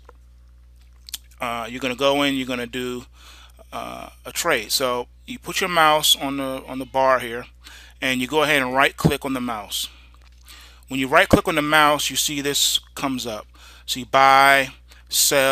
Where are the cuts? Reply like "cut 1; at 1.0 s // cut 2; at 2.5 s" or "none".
cut 1; at 9.4 s